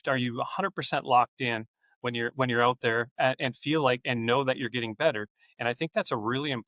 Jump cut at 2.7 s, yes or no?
no